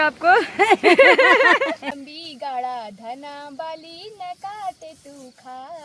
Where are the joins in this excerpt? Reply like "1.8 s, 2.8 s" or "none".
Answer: 2.0 s